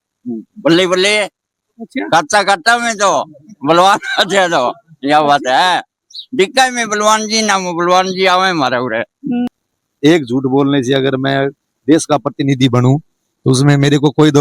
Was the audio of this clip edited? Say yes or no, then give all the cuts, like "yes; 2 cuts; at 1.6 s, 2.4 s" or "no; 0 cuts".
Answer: yes; 1 cut; at 9.5 s